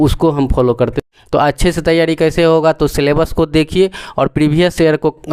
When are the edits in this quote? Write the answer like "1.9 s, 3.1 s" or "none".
1.0 s